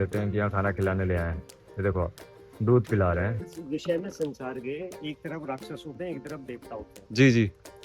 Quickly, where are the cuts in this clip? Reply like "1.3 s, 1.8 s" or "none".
3.6 s